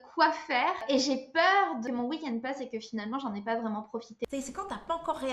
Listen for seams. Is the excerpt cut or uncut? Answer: cut